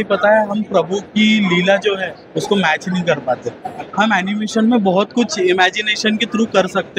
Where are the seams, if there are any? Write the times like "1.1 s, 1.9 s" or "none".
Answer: none